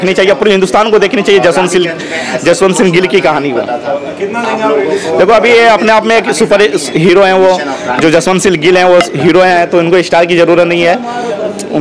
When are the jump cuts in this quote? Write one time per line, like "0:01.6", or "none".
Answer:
none